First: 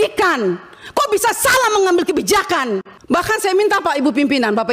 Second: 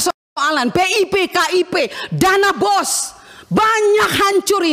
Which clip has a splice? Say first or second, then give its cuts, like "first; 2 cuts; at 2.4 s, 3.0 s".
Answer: first; 1 cut; at 2.9 s